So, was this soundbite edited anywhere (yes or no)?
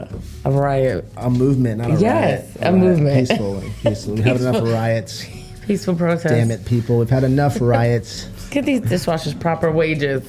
yes